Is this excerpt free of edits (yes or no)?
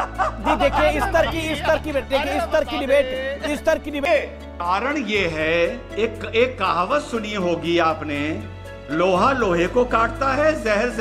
no